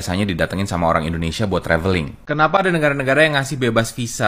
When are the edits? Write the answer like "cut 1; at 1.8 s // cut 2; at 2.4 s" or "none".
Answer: cut 1; at 2.1 s